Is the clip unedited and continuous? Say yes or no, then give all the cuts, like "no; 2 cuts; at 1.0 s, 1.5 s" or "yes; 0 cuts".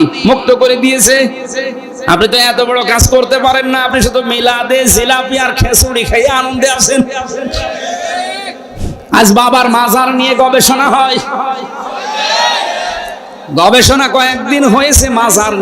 no; 1 cut; at 8.8 s